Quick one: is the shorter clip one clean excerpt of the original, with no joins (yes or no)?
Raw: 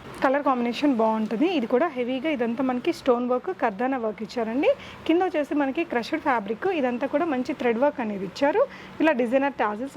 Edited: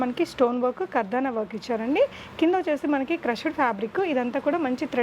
yes